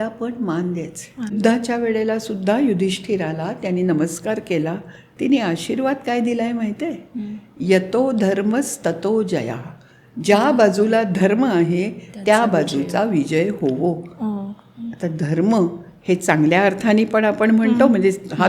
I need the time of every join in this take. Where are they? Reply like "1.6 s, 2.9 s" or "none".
1.3 s